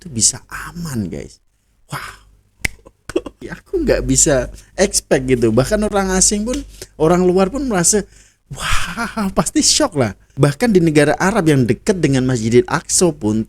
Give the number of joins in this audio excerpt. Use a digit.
2